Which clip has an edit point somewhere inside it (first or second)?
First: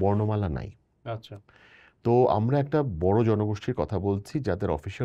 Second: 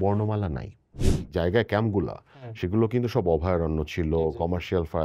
second